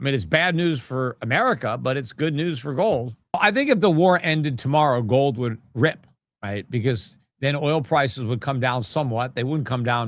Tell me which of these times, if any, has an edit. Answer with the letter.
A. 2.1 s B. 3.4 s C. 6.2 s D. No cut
B